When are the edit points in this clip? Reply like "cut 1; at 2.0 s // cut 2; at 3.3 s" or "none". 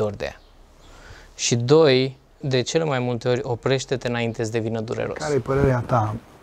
cut 1; at 2.4 s // cut 2; at 5.2 s